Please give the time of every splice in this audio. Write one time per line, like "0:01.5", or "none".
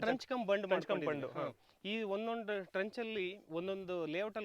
none